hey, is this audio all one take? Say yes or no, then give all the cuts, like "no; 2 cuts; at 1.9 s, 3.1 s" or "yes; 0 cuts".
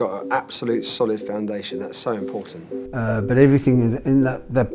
no; 1 cut; at 2.7 s